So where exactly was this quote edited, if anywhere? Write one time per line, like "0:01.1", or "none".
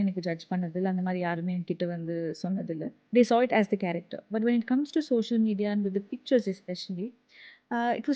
0:03.0